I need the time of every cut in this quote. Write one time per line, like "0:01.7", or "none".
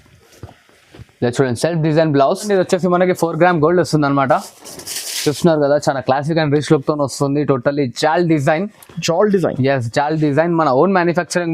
0:02.4